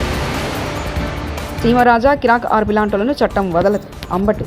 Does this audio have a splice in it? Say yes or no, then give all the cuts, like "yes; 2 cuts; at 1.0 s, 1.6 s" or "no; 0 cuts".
yes; 1 cut; at 1.6 s